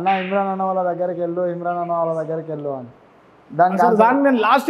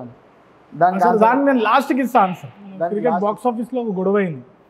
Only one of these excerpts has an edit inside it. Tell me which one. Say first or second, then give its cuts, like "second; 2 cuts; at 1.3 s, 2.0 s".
second; 1 cut; at 2.9 s